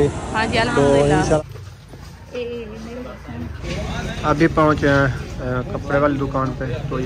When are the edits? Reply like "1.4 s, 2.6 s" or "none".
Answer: 1.4 s, 3.7 s